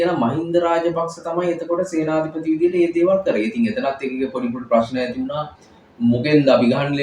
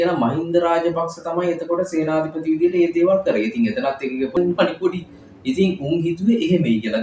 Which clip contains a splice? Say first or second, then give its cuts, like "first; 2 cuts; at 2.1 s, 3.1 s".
second; 1 cut; at 4.4 s